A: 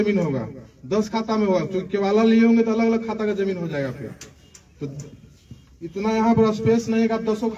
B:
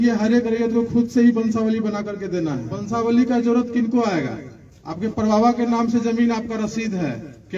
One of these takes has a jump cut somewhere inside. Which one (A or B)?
B